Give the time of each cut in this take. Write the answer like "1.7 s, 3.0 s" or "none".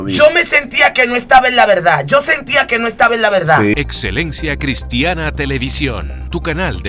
3.7 s